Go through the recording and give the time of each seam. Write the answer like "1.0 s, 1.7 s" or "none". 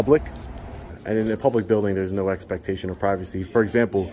1.0 s